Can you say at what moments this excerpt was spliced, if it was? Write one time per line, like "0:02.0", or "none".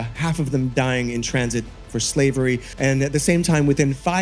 0:02.7